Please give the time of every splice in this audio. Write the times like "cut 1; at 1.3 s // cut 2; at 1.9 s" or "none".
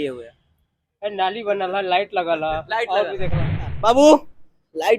cut 1; at 3.7 s